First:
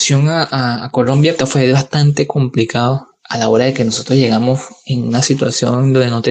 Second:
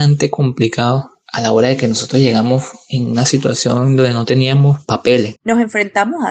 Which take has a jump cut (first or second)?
second